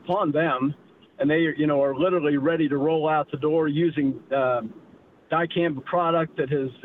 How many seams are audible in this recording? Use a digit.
0